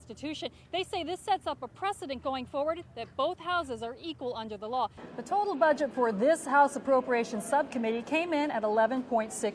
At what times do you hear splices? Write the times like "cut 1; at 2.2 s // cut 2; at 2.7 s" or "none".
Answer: cut 1; at 5.0 s